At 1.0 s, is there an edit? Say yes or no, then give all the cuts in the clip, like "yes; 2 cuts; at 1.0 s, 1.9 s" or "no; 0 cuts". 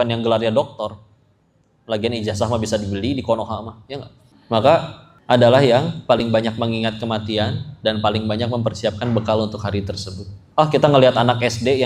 no; 0 cuts